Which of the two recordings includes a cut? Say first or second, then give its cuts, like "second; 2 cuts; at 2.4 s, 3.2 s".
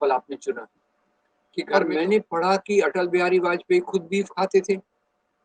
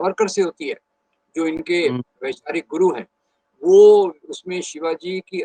first; 1 cut; at 1.7 s